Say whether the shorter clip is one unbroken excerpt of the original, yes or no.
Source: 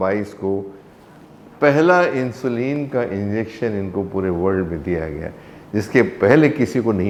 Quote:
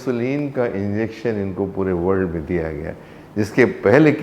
yes